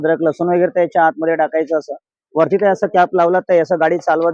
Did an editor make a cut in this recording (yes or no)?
no